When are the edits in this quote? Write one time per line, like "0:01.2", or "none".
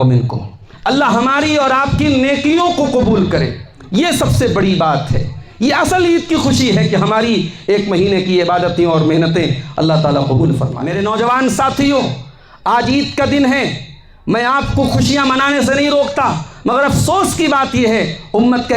0:10.8